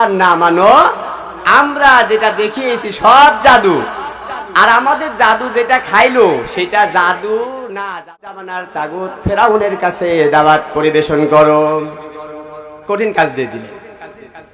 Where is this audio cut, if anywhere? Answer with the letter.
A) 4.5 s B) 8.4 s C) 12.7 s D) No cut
B